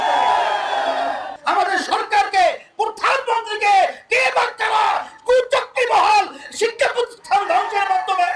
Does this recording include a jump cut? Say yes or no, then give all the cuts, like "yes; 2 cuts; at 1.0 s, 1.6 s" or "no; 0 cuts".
yes; 1 cut; at 1.3 s